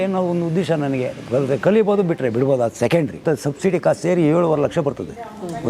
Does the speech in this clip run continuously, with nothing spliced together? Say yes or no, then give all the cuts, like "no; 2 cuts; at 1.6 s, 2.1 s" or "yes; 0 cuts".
no; 1 cut; at 3.2 s